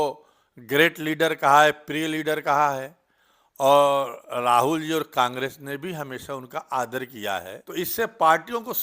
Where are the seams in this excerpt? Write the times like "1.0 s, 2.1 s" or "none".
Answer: 7.9 s